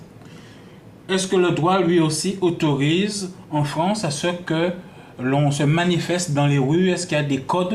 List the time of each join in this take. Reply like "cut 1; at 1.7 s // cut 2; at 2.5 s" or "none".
cut 1; at 1.3 s